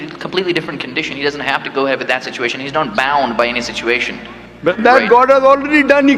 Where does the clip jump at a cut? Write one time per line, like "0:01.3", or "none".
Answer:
0:04.7